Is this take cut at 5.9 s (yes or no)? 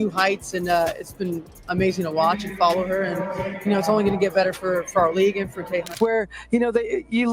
yes